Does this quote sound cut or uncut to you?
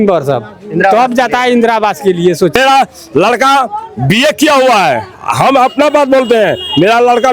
cut